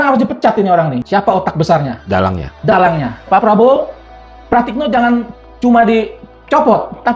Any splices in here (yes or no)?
yes